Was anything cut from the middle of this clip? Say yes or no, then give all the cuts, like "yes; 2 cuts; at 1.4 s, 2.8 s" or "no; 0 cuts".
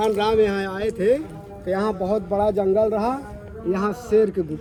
no; 0 cuts